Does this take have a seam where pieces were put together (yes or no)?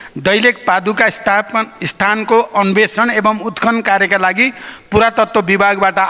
no